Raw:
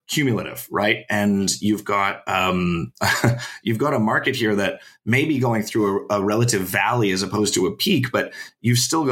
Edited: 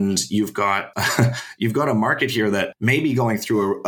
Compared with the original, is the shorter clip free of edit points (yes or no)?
no